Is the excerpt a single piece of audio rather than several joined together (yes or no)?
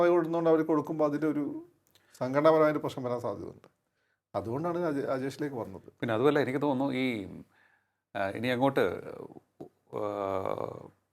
yes